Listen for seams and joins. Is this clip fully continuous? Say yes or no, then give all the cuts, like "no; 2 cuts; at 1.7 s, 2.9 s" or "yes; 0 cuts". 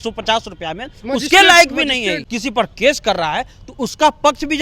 no; 1 cut; at 2.2 s